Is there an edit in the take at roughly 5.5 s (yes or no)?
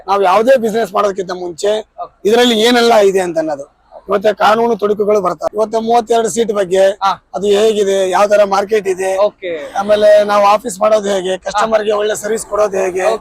yes